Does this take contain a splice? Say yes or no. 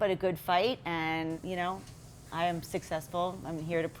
yes